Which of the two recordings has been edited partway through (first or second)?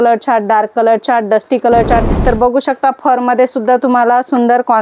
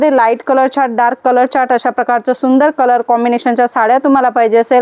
first